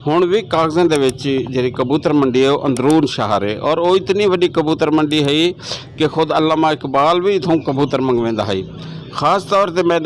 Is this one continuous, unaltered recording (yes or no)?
yes